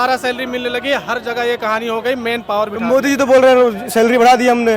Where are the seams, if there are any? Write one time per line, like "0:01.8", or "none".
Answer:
none